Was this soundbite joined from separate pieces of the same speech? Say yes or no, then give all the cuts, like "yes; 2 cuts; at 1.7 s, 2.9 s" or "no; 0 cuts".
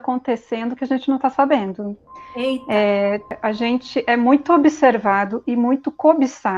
yes; 1 cut; at 3.4 s